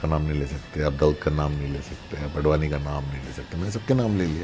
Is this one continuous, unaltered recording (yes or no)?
yes